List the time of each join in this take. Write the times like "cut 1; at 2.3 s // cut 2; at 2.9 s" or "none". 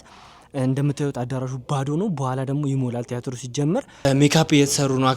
cut 1; at 4.0 s